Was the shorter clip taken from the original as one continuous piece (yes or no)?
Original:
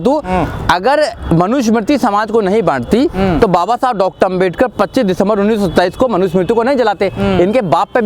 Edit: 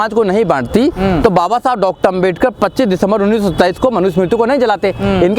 yes